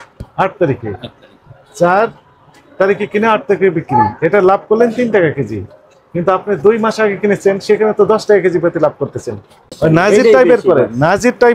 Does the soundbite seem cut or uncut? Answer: cut